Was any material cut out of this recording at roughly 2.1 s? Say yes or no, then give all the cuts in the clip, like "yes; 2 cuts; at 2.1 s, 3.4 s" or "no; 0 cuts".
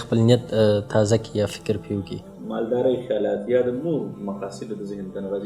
yes; 1 cut; at 2.1 s